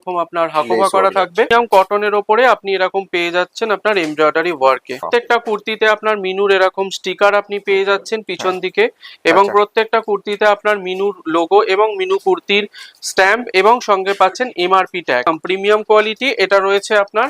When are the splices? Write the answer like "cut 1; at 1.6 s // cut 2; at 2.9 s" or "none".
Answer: cut 1; at 1.5 s // cut 2; at 5.1 s // cut 3; at 15.2 s